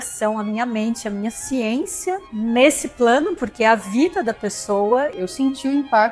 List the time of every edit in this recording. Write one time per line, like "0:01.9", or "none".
0:02.3
0:05.2